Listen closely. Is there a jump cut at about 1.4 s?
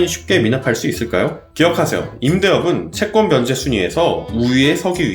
yes; 1 cut; at 1.4 s

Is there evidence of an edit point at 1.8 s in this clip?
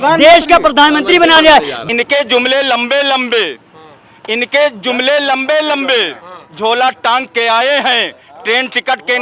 yes; 1 cut; at 1.8 s

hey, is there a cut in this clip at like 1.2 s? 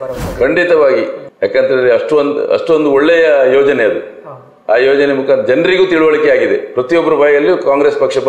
yes; 1 cut; at 1.2 s

